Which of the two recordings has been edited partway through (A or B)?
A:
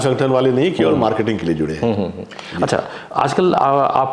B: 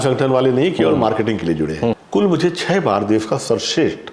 B